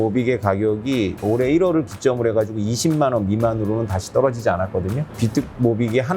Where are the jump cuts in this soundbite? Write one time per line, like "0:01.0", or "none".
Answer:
0:01.2